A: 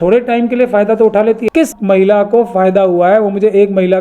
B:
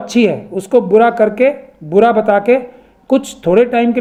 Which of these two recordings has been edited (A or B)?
A